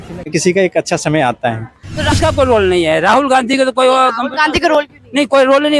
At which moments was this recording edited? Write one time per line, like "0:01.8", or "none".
0:02.1